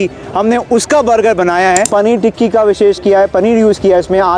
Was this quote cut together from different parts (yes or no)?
yes